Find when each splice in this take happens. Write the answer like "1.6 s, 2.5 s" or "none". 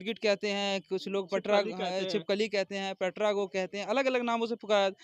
none